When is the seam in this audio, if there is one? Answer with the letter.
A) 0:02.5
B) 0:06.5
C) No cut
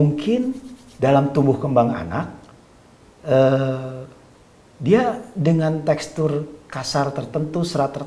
C